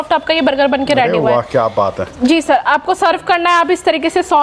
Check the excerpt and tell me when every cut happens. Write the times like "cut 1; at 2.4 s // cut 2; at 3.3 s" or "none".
none